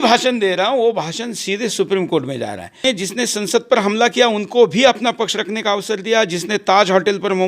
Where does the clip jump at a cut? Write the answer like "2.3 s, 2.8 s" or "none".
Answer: 2.8 s